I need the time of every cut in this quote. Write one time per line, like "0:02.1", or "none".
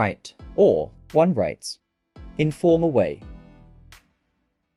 none

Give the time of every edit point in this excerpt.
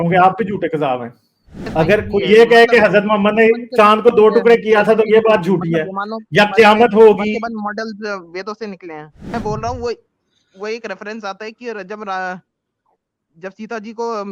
0:01.6
0:09.3

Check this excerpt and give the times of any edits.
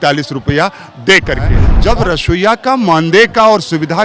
0:01.7

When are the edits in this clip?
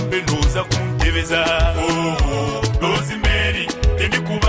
0:02.8

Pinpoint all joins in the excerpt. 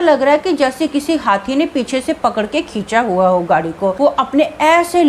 0:03.9

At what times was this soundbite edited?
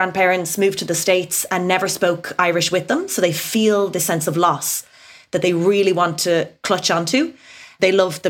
none

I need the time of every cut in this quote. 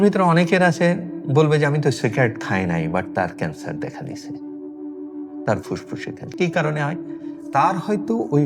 none

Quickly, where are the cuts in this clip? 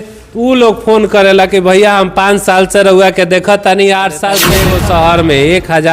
0:04.5

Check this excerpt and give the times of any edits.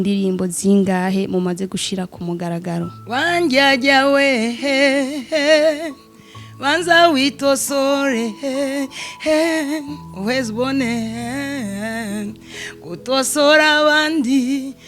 0:03.0

